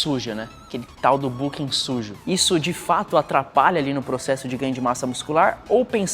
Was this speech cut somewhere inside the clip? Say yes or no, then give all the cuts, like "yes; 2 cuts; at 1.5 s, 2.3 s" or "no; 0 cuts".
yes; 1 cut; at 2.1 s